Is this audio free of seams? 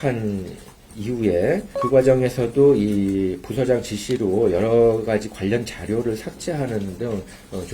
no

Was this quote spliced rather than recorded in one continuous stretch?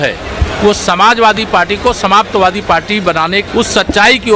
yes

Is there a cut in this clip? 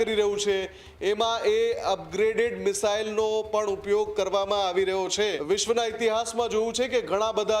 yes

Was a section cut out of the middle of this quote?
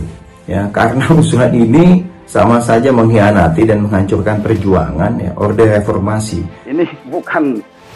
yes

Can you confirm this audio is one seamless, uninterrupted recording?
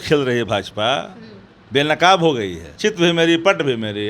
no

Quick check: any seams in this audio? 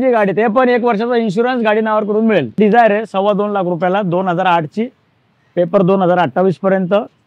yes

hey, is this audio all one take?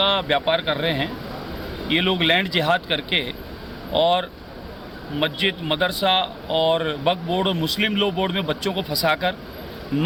yes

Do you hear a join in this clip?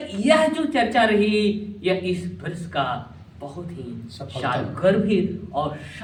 no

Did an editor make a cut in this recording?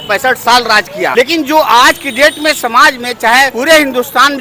yes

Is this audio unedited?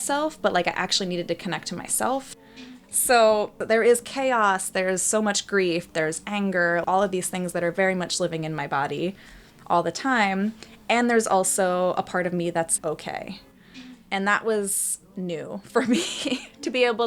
no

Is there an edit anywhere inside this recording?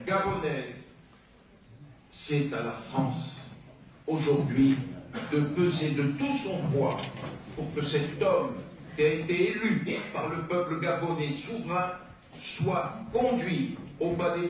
yes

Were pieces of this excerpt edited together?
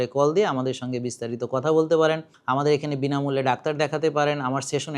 yes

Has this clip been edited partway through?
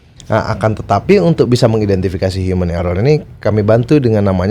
no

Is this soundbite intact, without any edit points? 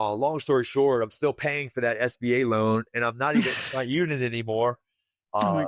yes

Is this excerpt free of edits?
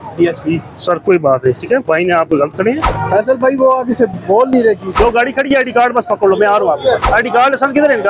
no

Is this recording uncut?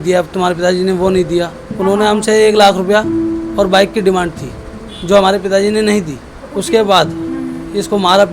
no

